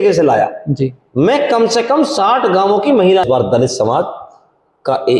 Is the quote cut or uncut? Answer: cut